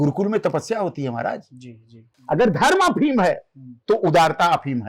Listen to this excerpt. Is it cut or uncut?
cut